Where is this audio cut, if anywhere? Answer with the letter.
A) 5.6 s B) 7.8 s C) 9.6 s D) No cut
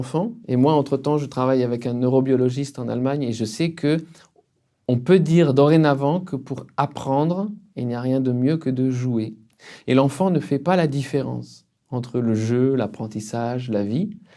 D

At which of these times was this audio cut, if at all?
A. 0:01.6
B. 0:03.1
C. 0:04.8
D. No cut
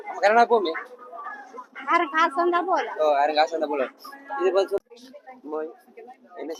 C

